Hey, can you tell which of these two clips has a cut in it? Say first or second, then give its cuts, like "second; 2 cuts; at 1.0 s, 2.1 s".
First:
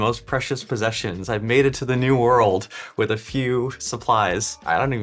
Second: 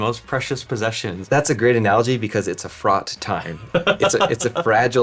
second; 1 cut; at 1.2 s